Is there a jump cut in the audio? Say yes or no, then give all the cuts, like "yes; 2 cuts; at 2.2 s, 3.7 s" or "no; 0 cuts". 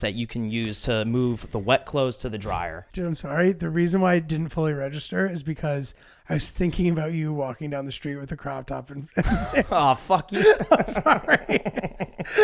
yes; 1 cut; at 2.8 s